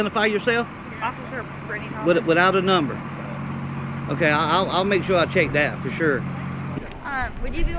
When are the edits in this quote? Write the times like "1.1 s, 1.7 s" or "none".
6.7 s